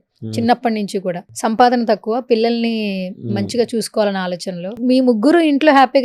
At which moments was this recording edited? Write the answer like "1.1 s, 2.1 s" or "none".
1.3 s, 4.8 s